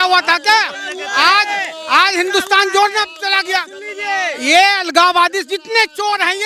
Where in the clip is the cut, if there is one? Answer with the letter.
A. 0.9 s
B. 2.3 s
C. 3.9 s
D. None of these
D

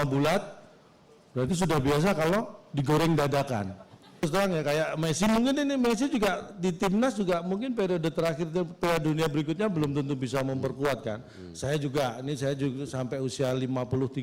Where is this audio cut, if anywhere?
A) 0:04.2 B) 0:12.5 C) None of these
A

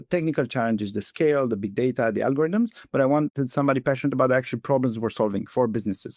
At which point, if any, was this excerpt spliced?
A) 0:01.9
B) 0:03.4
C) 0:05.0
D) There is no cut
B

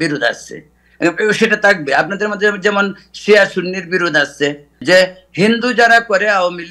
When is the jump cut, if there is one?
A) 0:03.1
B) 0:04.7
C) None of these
B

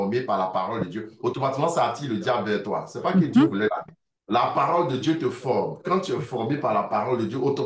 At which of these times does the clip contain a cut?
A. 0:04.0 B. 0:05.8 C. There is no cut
C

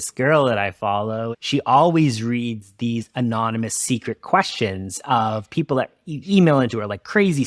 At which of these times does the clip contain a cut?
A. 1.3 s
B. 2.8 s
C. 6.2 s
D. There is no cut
A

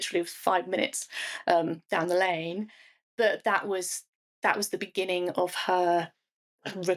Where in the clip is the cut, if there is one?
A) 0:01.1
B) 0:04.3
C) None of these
C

